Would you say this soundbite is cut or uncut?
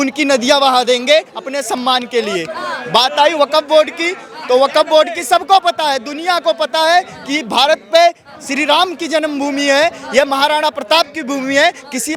uncut